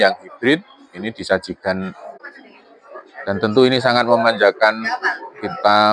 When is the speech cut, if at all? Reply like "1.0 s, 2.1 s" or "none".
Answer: 2.2 s